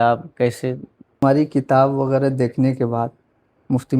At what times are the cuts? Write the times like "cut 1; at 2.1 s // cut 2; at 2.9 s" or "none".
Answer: cut 1; at 1.2 s

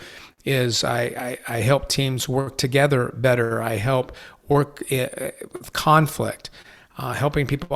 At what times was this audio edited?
none

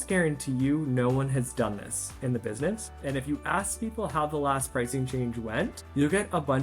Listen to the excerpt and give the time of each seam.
cut 1; at 2.9 s // cut 2; at 5.8 s

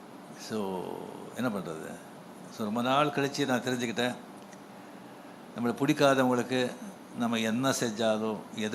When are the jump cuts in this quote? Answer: none

